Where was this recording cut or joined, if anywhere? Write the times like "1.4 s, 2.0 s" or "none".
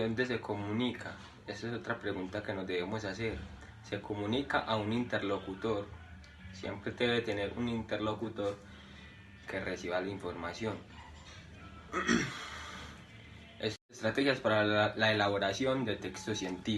13.8 s